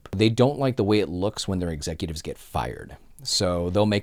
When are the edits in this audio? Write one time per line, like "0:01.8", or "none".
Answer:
none